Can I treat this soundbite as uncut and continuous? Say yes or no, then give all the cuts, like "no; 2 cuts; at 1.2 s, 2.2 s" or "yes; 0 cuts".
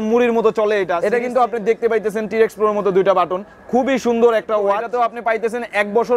no; 2 cuts; at 1.0 s, 4.9 s